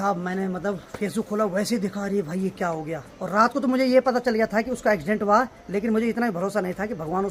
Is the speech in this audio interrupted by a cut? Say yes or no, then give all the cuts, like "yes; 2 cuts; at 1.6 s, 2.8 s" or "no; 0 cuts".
no; 0 cuts